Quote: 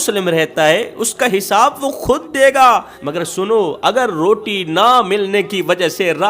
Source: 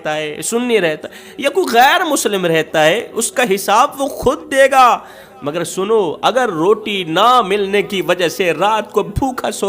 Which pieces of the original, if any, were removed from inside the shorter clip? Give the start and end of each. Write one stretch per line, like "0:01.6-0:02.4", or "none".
0:05.2-0:05.4